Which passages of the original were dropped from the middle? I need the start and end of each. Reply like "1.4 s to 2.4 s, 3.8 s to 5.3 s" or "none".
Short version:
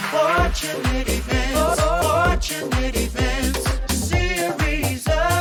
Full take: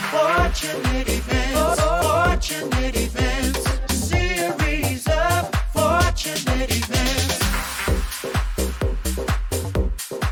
none